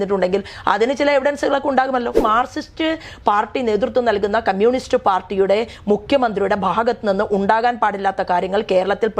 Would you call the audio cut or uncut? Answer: cut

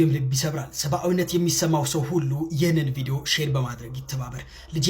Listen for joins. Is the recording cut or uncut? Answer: uncut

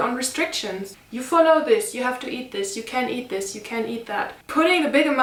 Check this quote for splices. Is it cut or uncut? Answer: uncut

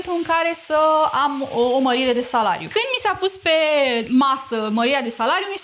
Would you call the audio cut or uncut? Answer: cut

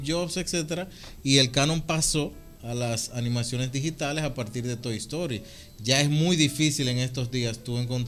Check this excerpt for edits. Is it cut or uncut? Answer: uncut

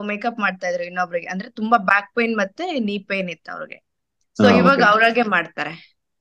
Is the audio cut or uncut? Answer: uncut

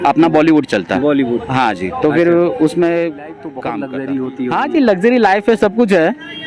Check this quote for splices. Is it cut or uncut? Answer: cut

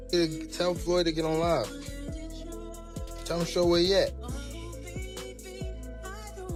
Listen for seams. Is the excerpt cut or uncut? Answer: uncut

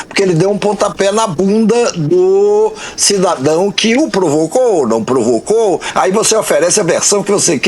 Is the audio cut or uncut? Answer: cut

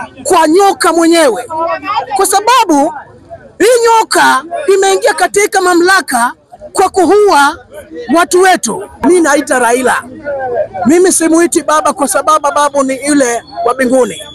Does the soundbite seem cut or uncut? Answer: cut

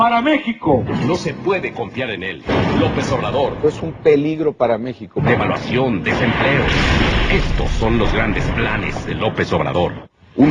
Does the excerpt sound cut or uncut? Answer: uncut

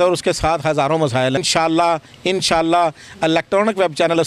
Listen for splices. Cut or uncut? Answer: cut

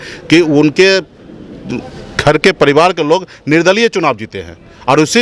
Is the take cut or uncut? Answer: uncut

